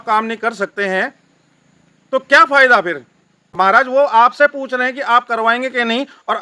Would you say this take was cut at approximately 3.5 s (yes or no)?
yes